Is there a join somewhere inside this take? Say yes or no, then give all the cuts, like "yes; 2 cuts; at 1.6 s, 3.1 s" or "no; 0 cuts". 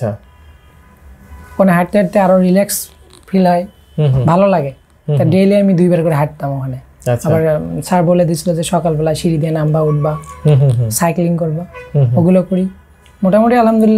no; 0 cuts